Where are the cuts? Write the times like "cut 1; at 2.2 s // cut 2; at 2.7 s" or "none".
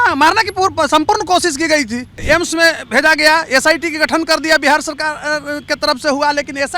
cut 1; at 2.1 s